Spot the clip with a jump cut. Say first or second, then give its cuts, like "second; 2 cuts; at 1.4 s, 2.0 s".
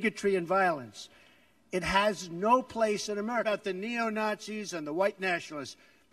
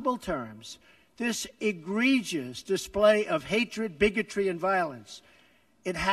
first; 1 cut; at 3.4 s